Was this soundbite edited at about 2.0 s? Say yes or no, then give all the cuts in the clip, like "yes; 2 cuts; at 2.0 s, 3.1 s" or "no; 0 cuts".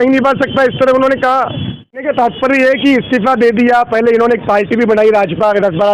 yes; 1 cut; at 2.0 s